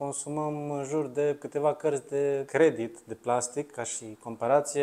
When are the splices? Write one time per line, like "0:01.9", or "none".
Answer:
0:02.5